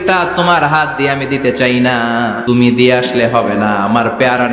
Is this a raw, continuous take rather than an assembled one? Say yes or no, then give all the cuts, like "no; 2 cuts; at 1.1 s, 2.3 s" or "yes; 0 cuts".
no; 1 cut; at 2.4 s